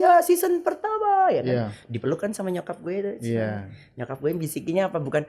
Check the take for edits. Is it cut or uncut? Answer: uncut